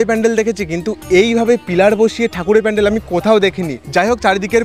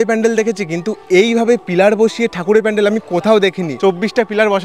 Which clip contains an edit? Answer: second; 1 cut; at 3.7 s

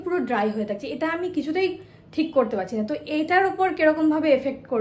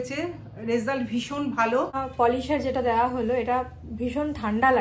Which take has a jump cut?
second; 1 cut; at 2.0 s

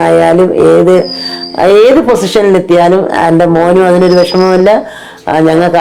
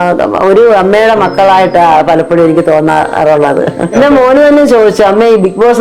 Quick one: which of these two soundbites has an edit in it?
second; 1 cut; at 3.9 s

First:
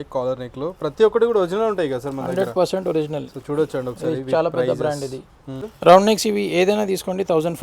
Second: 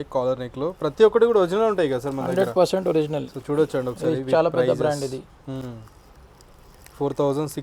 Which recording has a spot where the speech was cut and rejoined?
first; 1 cut; at 5.6 s

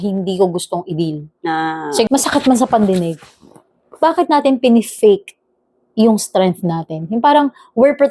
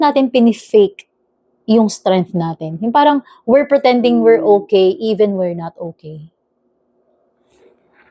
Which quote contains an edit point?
first; 1 cut; at 2.1 s

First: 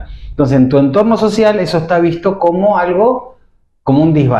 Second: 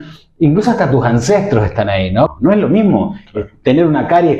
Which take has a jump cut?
second; 1 cut; at 2.3 s

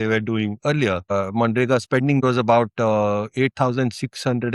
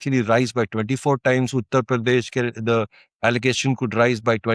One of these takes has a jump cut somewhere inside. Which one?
first; 2 cuts; at 1.1 s, 2.2 s

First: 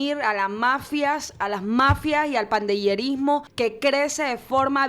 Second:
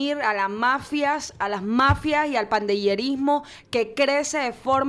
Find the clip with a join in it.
first; 1 cut; at 3.5 s

